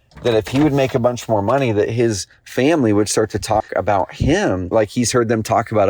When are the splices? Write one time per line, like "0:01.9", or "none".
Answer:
0:04.7